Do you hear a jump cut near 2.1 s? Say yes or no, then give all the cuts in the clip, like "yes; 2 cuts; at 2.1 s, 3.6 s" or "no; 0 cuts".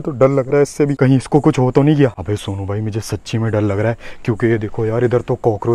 no; 0 cuts